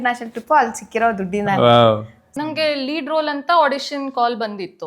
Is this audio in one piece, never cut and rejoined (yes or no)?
no